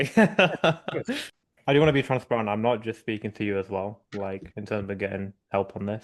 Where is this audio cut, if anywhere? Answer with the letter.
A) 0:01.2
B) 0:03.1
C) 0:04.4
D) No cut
A